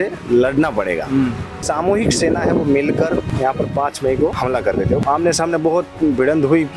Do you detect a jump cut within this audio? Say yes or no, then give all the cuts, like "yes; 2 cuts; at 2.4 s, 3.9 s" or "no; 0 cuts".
yes; 3 cuts; at 1.6 s, 3.2 s, 4.8 s